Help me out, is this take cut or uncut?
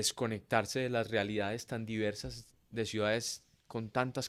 uncut